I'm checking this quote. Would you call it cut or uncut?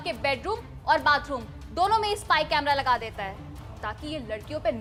uncut